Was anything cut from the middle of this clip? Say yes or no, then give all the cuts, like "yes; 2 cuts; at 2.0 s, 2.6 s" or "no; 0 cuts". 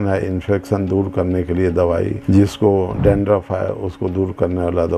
no; 0 cuts